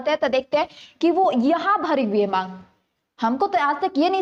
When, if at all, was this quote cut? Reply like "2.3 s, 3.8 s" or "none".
none